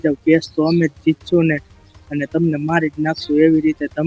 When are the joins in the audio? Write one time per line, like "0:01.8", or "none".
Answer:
none